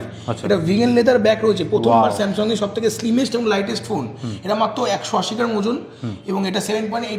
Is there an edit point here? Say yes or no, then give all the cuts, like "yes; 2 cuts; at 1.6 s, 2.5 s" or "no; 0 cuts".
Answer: no; 0 cuts